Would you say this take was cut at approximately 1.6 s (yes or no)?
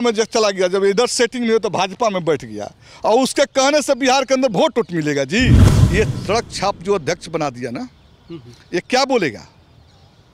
no